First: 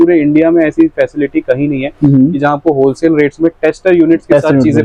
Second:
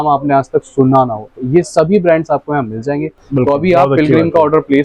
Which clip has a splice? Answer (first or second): second